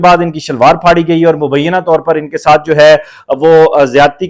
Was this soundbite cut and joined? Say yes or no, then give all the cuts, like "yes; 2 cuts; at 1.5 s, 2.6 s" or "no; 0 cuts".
no; 0 cuts